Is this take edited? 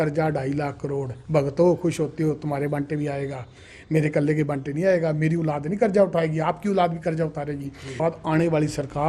yes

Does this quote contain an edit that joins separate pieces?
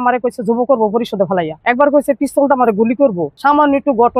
yes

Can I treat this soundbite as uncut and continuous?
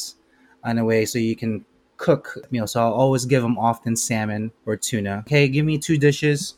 no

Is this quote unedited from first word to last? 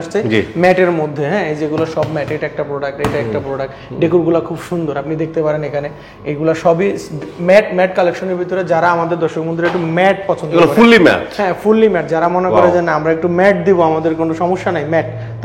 yes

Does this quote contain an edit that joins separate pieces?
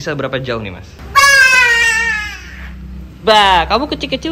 yes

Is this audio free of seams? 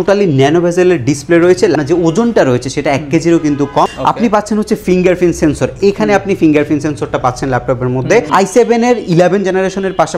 no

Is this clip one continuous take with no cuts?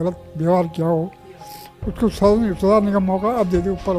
yes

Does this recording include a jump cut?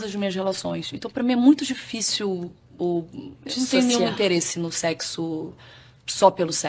no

